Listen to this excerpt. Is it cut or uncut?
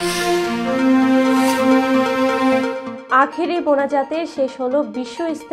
uncut